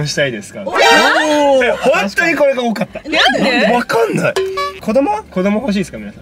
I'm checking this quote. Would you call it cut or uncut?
cut